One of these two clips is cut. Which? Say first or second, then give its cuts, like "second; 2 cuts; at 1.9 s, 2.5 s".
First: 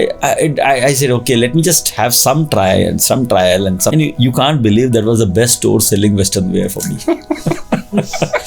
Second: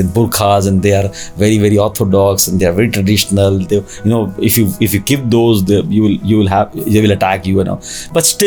first; 1 cut; at 3.9 s